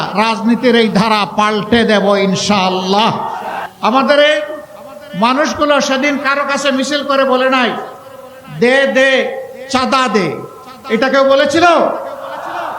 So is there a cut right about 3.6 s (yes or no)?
yes